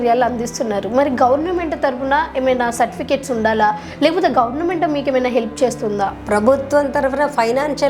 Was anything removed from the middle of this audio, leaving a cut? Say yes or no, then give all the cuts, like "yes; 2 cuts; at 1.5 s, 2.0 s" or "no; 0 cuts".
yes; 1 cut; at 6.2 s